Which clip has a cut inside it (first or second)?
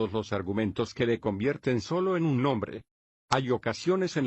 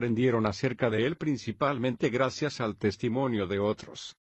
first